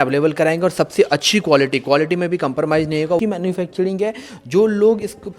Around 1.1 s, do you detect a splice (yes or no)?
no